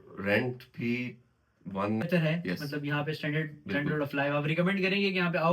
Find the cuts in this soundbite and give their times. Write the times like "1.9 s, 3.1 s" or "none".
2.0 s